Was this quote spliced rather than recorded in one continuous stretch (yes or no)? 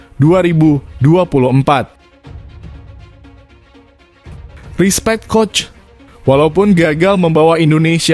yes